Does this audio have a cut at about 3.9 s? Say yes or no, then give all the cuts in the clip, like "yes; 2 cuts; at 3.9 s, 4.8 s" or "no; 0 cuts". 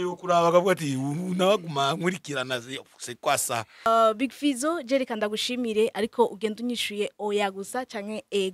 yes; 1 cut; at 3.9 s